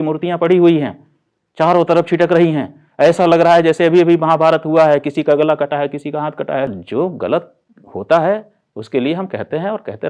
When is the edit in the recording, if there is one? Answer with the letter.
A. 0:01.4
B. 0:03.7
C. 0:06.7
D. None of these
C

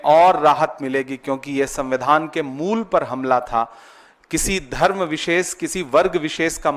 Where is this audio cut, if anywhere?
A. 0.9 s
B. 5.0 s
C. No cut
C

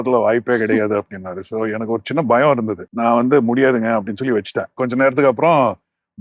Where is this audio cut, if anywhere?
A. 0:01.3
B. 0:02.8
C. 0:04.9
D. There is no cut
B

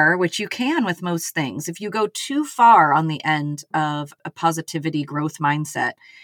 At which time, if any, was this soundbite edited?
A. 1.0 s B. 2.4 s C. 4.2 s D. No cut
C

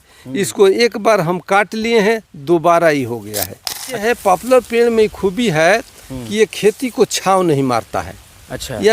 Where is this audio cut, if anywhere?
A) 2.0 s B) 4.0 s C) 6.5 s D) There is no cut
B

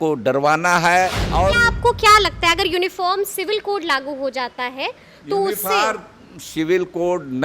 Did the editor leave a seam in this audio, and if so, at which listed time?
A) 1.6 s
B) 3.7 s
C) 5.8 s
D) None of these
A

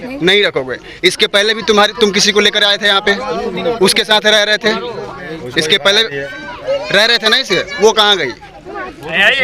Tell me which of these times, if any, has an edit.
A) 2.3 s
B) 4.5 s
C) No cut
C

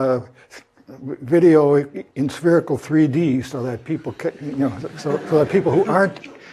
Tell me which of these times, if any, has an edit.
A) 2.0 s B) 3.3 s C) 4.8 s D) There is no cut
A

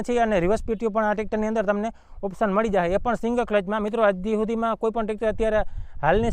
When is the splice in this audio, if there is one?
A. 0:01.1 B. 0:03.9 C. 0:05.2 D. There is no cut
D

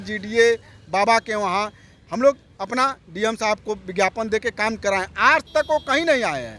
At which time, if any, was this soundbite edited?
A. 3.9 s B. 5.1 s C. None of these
C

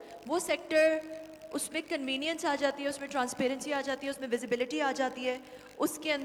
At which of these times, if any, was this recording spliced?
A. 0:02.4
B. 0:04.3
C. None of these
C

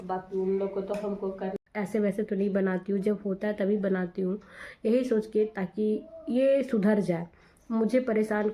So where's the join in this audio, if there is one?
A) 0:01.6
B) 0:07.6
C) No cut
A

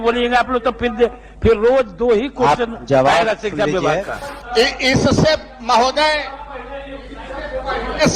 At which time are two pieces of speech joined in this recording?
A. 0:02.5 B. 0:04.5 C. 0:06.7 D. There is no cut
B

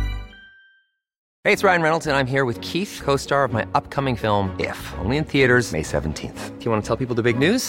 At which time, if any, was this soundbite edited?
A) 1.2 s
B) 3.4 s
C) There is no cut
A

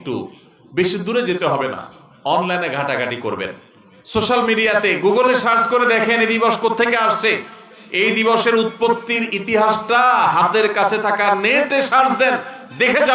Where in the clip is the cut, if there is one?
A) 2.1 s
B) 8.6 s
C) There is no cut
C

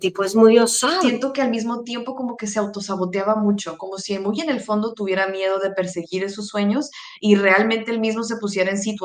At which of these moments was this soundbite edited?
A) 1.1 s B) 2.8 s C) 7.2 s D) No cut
A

